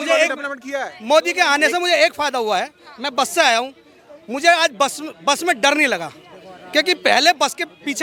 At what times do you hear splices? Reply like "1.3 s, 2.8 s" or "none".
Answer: none